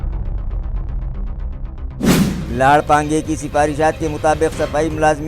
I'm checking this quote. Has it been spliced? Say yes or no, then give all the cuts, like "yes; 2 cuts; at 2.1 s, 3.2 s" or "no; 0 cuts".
yes; 1 cut; at 2.1 s